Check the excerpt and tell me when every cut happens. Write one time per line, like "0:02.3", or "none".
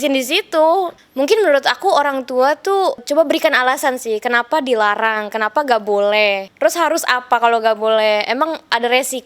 0:01.0
0:03.1
0:06.5